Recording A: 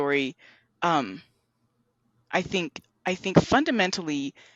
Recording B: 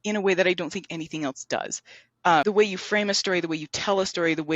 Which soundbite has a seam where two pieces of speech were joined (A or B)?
B